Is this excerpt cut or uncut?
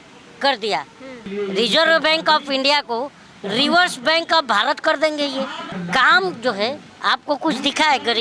cut